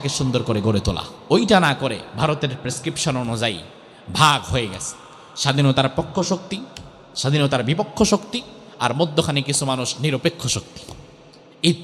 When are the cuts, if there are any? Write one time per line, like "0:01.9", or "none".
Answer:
0:01.1
0:02.1